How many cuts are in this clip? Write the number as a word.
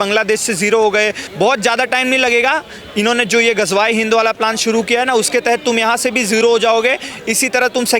one